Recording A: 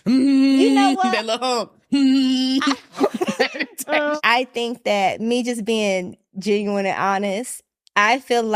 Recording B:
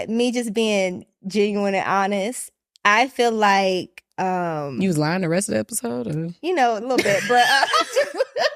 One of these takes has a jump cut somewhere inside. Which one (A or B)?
A